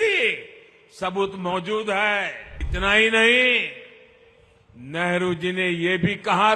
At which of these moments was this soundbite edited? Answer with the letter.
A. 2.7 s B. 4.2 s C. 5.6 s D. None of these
A